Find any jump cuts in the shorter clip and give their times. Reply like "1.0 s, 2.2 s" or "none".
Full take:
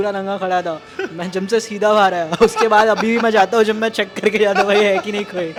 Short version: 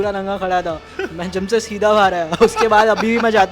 none